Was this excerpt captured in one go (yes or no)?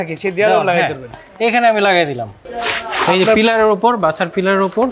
yes